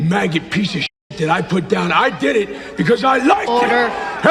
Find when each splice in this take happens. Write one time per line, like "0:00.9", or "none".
none